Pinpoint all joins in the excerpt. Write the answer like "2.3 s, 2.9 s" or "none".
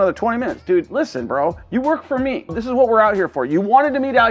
none